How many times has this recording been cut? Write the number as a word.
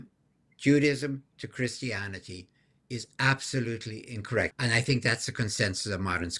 one